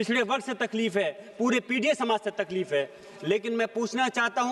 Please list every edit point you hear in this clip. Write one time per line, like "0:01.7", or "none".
none